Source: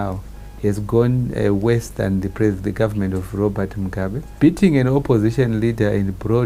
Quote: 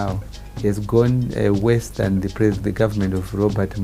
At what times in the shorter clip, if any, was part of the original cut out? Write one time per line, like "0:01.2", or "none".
none